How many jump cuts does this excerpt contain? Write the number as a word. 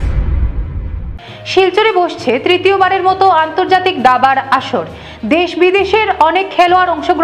one